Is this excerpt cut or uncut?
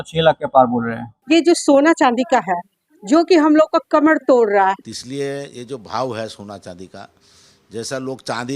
cut